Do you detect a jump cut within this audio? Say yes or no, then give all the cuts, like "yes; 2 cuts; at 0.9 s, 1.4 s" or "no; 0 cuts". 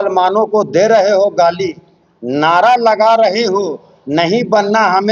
no; 0 cuts